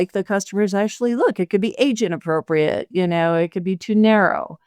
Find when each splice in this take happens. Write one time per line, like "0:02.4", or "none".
none